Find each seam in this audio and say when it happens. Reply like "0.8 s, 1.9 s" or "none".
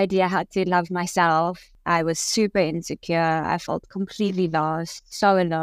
1.7 s